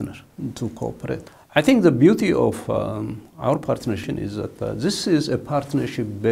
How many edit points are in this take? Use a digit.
2